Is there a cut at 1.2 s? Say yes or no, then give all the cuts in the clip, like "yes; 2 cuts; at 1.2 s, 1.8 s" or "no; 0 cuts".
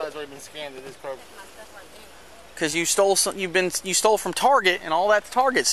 yes; 1 cut; at 1.2 s